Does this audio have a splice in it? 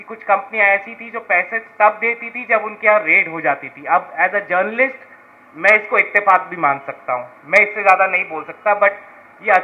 no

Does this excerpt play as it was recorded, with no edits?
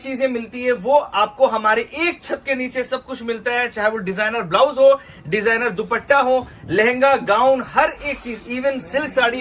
yes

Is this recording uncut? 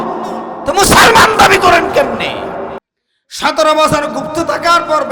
no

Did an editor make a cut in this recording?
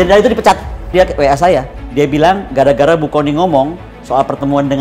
yes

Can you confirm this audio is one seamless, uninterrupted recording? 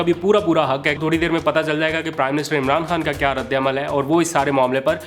no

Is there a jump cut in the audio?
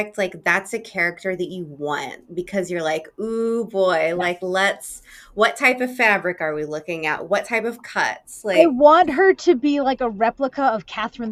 no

